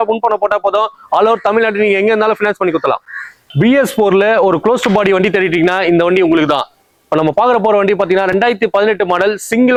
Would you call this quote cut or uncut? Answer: uncut